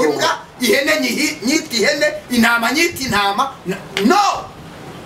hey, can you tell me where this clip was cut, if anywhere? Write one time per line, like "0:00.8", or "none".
none